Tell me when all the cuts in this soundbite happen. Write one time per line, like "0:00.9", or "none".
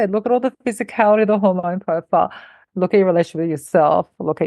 none